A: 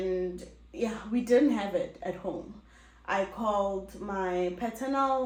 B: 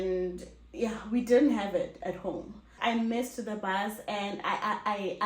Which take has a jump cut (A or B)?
B